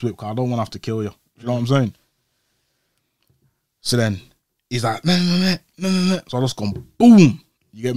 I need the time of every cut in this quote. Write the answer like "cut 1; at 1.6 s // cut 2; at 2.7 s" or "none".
none